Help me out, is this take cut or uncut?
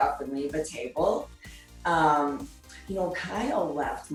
uncut